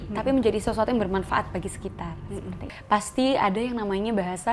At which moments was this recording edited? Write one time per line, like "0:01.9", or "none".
0:02.7